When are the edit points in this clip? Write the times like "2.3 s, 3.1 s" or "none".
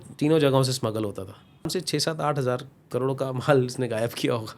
1.7 s

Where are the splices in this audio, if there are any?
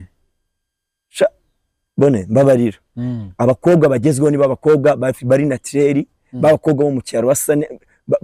none

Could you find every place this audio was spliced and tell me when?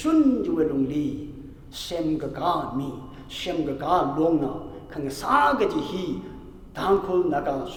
none

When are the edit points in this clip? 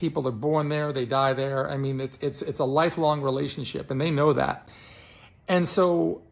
none

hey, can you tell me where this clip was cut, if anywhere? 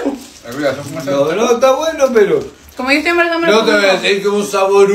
none

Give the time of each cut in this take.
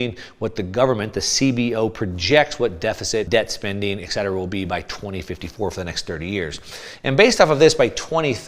3.3 s

